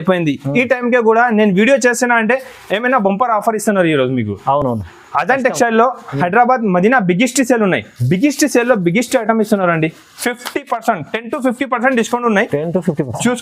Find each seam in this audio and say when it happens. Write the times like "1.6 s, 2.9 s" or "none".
none